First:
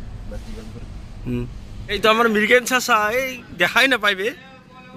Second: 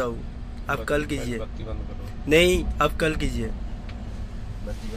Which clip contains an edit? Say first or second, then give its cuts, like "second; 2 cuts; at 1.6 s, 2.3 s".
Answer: first; 1 cut; at 2.0 s